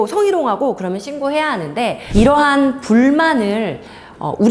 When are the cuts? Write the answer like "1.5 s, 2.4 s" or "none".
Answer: 2.0 s